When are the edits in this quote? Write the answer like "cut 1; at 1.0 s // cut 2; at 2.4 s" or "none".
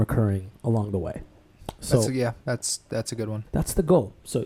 cut 1; at 3.4 s